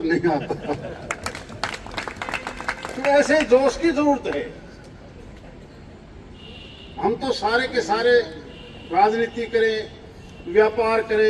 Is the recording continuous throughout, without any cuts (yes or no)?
yes